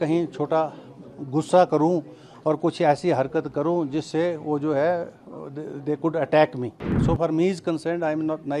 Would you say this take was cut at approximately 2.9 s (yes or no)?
no